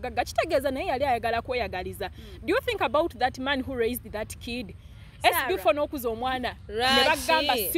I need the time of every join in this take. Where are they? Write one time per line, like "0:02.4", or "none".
none